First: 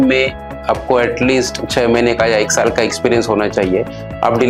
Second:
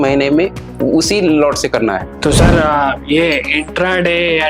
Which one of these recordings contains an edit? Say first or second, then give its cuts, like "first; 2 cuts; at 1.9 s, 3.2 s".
second; 1 cut; at 2.1 s